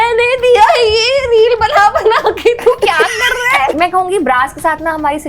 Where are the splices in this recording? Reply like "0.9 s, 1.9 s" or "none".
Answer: 3.7 s